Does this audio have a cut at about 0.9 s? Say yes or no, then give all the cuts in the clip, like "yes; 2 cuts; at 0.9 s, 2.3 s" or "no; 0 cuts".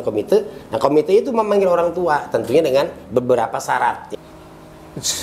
no; 1 cut; at 4.0 s